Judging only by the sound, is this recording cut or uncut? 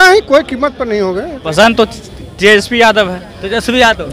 cut